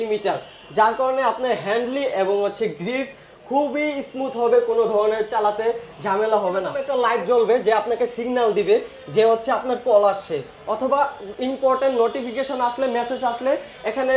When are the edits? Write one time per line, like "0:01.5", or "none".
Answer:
0:06.8